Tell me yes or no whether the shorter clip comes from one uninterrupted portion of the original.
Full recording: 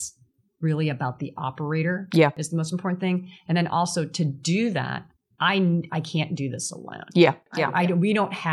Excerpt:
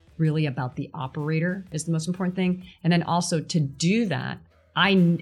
no